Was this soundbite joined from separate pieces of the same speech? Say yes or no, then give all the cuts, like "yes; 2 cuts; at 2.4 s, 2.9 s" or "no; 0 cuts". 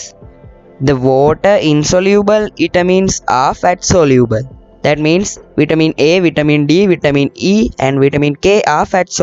no; 0 cuts